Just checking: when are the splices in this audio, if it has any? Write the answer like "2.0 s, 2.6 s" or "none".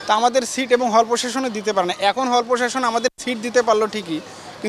none